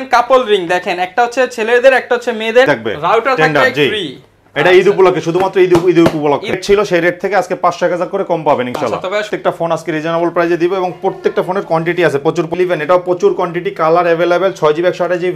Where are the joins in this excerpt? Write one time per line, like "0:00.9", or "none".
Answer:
0:02.7
0:06.6
0:09.3
0:12.5